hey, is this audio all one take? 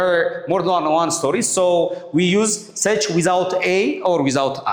yes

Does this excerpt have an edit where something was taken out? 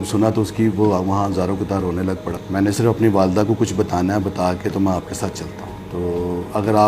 yes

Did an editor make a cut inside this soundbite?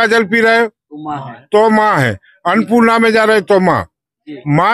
no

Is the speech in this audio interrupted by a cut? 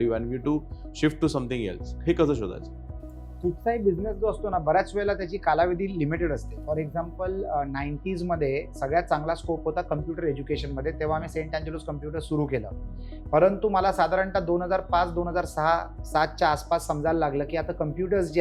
no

